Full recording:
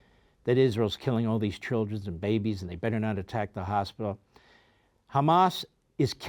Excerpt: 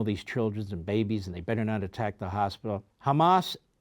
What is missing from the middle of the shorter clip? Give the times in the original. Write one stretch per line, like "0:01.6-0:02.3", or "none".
0:04.3-0:05.0